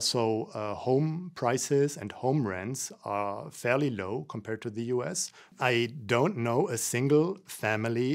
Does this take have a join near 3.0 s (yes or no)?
no